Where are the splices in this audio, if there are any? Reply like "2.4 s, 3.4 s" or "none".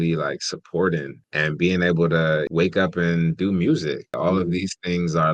1.2 s, 2.5 s, 4.1 s